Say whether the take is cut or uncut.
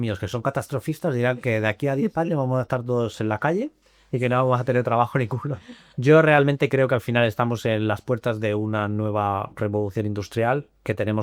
uncut